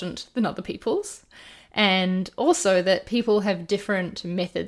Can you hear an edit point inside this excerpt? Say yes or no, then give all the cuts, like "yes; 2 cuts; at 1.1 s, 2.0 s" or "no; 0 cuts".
no; 0 cuts